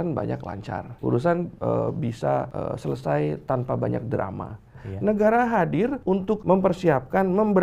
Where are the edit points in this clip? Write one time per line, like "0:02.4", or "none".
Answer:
0:00.9
0:01.5
0:02.5
0:04.8
0:06.1